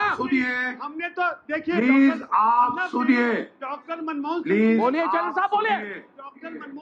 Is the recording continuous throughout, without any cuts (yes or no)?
yes